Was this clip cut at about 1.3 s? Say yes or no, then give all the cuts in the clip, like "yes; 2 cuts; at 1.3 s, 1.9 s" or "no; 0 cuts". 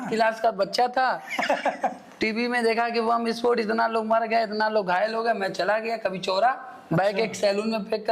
no; 0 cuts